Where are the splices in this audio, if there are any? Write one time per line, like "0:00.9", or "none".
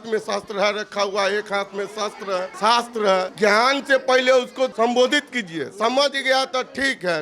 0:02.5
0:03.3
0:04.7